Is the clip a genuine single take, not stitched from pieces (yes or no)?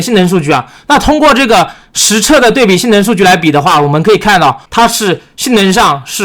no